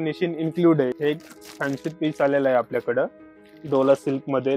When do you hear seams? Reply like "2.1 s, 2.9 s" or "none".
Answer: 0.9 s